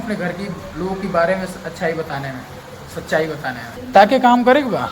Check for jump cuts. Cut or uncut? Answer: cut